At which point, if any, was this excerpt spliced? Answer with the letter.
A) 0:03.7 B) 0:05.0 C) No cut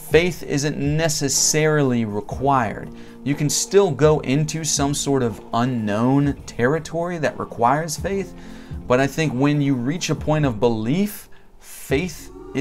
C